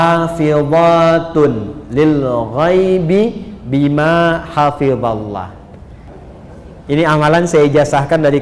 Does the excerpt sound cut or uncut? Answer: cut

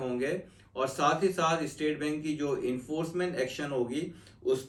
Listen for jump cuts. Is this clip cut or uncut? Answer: uncut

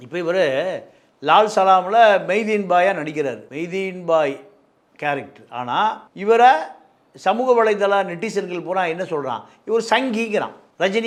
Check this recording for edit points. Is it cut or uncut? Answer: uncut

